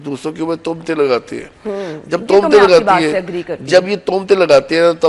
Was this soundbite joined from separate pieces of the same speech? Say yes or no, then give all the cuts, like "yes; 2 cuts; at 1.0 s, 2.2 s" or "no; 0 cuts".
no; 0 cuts